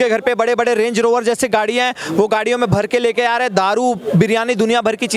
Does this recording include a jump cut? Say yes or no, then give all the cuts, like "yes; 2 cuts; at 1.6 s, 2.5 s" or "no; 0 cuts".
no; 0 cuts